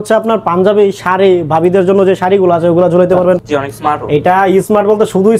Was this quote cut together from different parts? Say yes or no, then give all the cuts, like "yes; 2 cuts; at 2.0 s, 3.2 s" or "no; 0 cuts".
yes; 1 cut; at 3.5 s